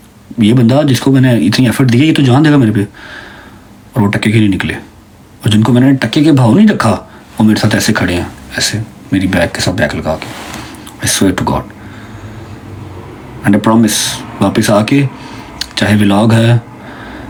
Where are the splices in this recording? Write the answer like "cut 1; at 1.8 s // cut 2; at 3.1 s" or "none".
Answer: none

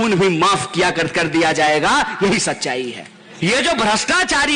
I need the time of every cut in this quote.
cut 1; at 3.2 s

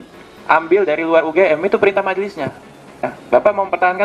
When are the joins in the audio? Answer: cut 1; at 3.1 s

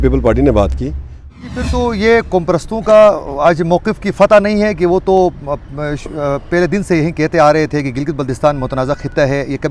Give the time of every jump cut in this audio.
cut 1; at 1.4 s

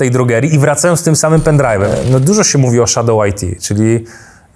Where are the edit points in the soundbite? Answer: cut 1; at 1.9 s

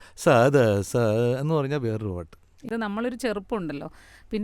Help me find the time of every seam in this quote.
cut 1; at 2.7 s

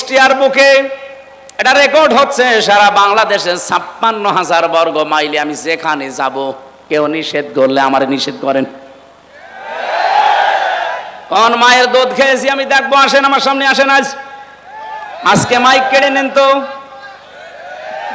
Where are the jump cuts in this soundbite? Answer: cut 1; at 6.8 s

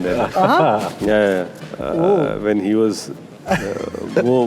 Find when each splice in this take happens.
none

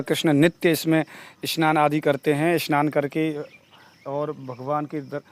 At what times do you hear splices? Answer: none

